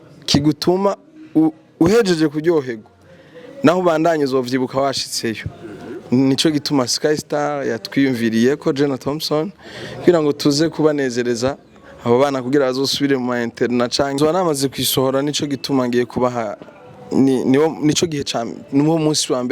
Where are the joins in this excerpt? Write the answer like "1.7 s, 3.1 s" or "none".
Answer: 14.2 s